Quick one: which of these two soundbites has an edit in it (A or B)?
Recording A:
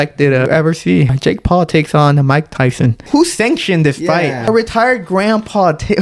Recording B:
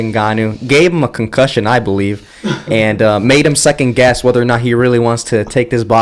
A